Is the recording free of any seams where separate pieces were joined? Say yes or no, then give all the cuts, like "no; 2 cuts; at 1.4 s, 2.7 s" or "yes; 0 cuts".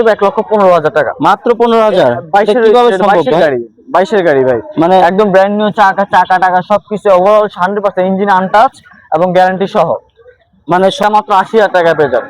no; 1 cut; at 11.0 s